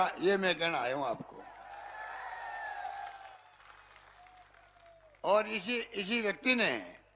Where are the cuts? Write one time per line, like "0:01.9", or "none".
0:03.4